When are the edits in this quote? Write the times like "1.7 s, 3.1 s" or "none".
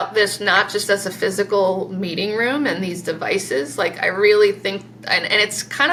none